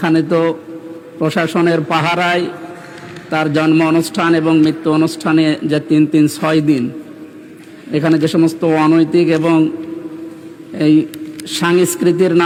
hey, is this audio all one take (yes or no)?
yes